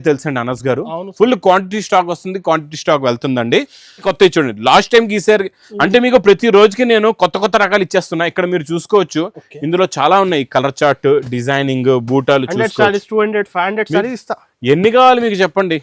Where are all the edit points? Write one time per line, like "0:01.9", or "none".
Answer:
0:04.0

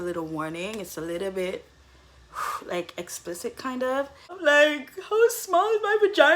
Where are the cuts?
0:04.3

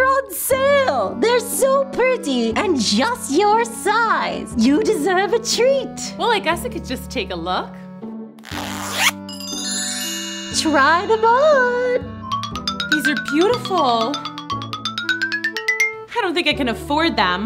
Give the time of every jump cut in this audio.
none

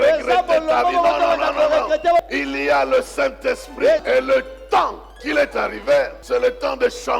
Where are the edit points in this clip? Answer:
0:02.2
0:04.0
0:05.2
0:06.2

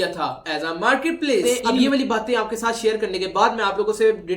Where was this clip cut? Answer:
0:01.4

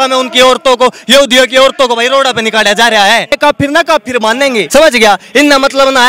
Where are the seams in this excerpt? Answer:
0:03.4
0:04.7

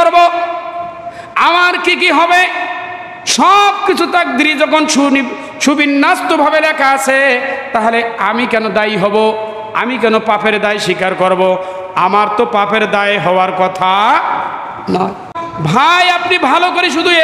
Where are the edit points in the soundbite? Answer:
0:15.5

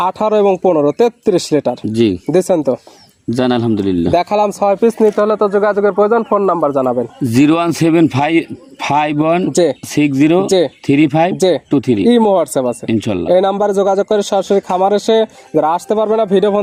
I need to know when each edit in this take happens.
none

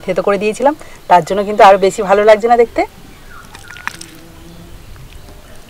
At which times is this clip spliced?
0:04.8

